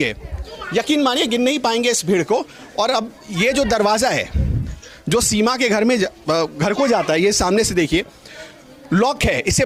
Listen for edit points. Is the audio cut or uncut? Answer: uncut